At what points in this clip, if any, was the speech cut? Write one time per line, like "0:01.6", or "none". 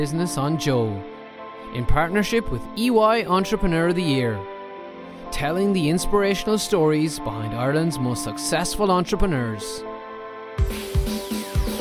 none